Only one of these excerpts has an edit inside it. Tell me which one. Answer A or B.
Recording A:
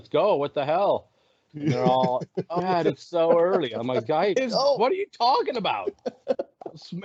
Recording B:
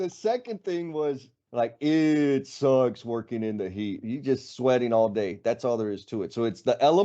B